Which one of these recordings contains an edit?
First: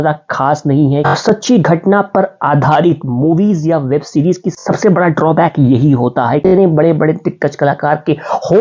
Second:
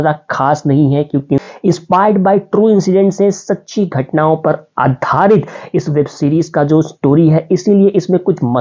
first; 2 cuts; at 1.1 s, 6.4 s

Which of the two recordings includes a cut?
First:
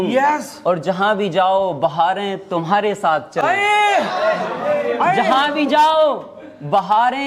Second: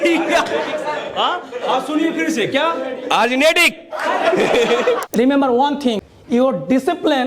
second; 2 cuts; at 5.0 s, 6.1 s

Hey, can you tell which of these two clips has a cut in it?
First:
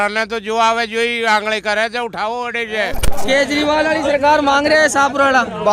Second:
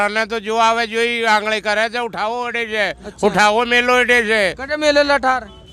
first; 1 cut; at 3.1 s

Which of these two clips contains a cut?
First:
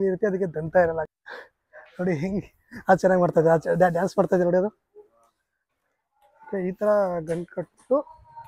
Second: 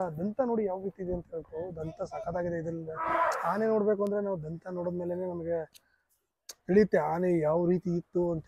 first; 2 cuts; at 1.1 s, 5.7 s

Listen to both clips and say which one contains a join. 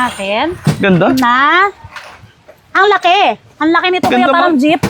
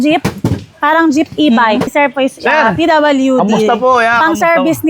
second; 1 cut; at 1.9 s

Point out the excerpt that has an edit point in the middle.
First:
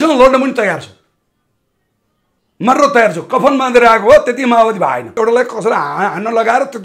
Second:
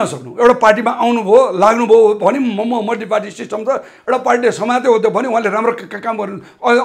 first; 1 cut; at 5.1 s

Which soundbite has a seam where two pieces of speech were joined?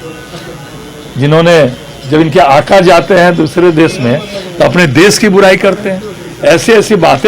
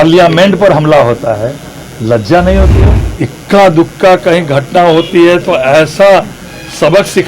second; 1 cut; at 3.0 s

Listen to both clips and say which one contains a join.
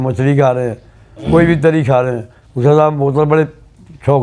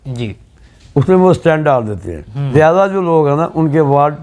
second; 1 cut; at 2.5 s

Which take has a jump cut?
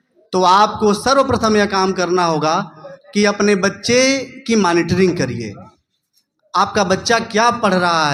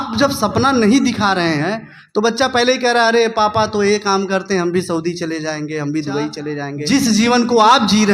second; 1 cut; at 6.8 s

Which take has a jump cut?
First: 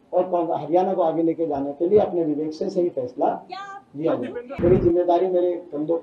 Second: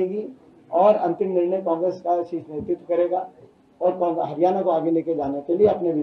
first; 1 cut; at 4.5 s

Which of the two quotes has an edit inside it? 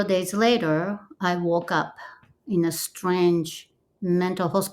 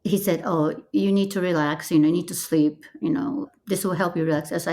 second; 1 cut; at 3.5 s

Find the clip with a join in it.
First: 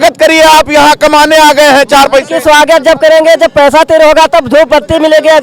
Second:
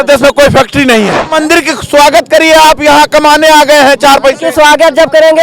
second; 1 cut; at 1.2 s

